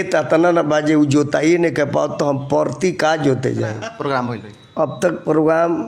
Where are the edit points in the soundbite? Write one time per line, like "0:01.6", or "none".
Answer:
0:03.8